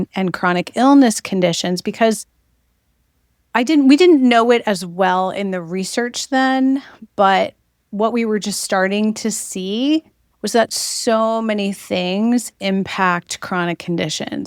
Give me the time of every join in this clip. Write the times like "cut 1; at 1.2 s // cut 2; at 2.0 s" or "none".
none